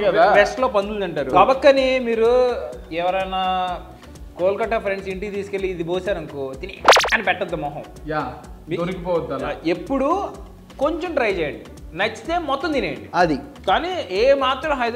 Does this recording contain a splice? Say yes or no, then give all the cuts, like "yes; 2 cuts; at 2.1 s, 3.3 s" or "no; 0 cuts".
no; 0 cuts